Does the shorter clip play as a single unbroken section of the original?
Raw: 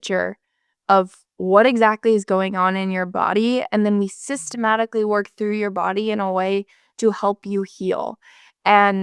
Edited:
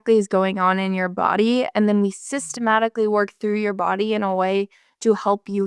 yes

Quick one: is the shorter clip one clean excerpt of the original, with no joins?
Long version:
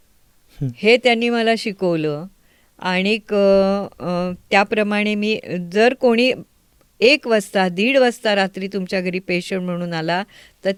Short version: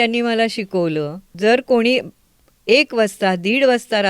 no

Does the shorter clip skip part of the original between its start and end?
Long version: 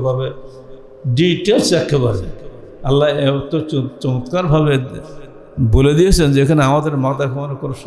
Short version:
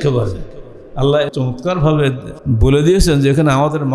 yes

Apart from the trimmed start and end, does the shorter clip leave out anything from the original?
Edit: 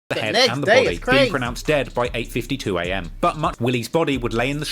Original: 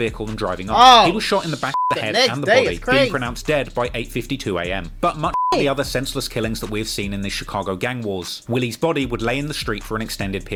yes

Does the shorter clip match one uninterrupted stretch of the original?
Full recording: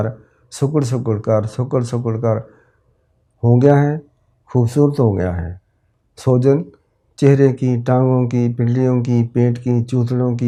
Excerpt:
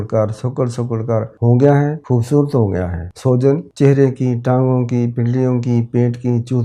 no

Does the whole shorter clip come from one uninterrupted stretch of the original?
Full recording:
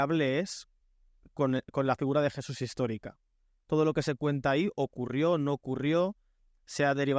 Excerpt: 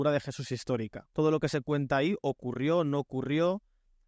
no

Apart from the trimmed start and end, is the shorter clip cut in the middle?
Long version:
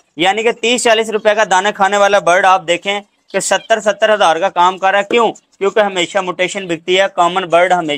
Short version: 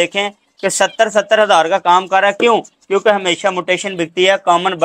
no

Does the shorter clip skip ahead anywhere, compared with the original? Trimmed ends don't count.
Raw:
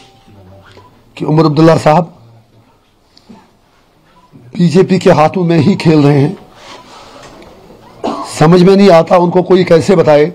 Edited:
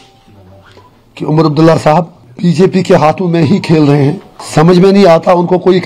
yes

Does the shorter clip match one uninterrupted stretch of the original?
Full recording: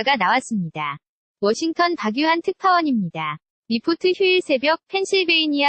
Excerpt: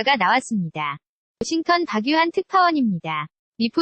no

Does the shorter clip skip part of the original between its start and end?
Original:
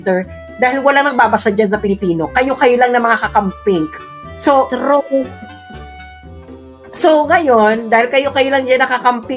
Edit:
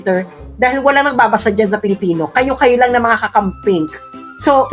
no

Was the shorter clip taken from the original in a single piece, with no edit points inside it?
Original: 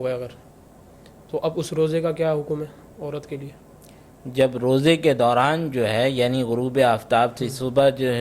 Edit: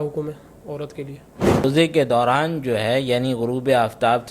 no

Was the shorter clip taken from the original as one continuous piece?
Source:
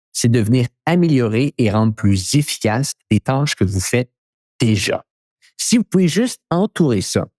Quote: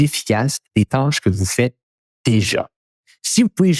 yes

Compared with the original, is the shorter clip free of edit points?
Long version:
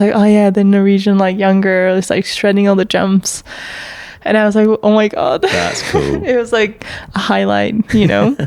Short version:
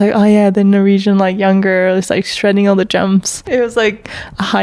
no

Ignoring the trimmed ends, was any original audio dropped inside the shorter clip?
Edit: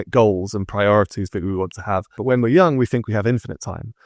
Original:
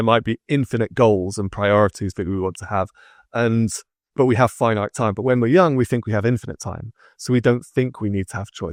yes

